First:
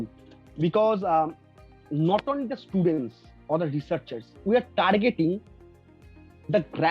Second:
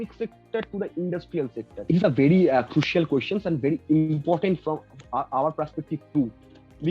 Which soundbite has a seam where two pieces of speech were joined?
second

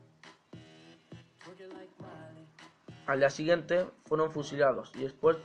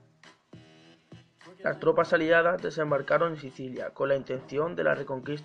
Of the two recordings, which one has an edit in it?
second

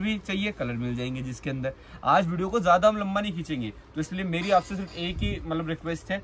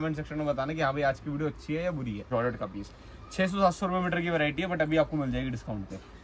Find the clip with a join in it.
second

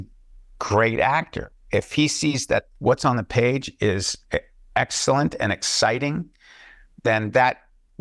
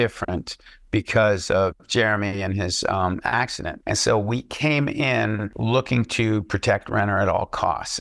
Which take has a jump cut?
second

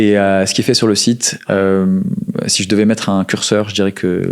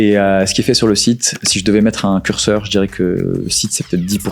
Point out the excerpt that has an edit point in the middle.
second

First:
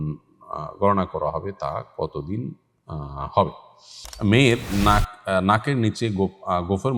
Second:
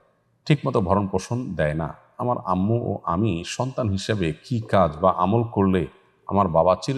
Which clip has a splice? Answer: first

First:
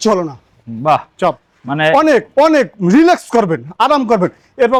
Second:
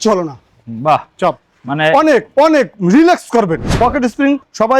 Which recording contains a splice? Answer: second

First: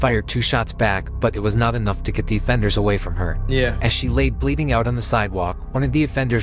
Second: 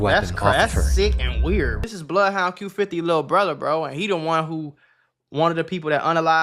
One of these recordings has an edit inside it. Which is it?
second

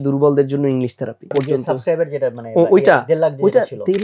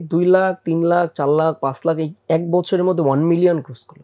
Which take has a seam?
first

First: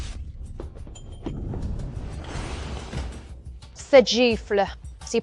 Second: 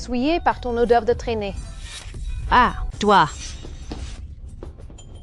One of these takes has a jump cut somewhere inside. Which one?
second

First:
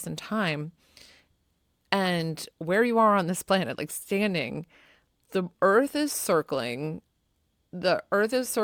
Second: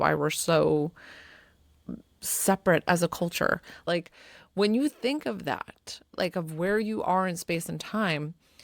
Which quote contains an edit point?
second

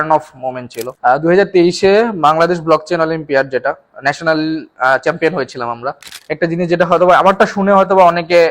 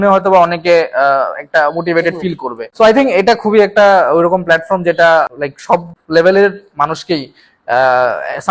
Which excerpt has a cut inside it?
first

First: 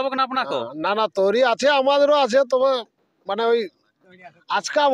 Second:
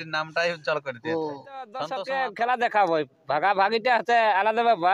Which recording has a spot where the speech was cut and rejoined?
second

